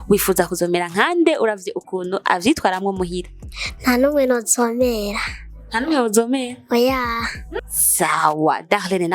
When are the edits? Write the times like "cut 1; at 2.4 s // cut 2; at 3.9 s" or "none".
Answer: cut 1; at 7.4 s